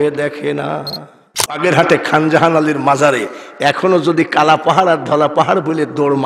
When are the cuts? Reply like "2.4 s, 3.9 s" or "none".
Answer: 1.6 s